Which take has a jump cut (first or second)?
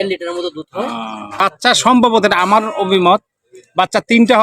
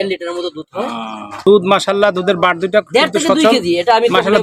first